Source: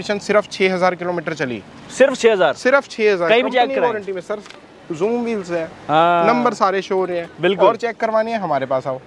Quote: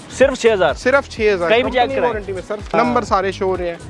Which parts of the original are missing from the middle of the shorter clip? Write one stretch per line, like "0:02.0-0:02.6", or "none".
0:04.5-0:06.2